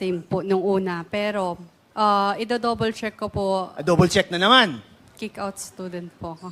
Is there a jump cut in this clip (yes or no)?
yes